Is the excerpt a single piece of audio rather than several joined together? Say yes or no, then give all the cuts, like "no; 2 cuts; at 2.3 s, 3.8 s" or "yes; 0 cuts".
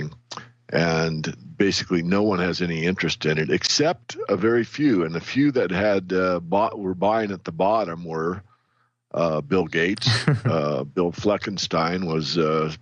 yes; 0 cuts